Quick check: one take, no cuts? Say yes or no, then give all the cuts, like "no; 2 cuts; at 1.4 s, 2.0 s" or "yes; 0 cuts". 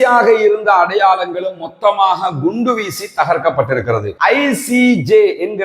no; 1 cut; at 4.1 s